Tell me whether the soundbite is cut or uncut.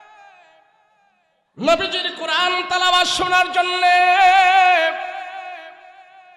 uncut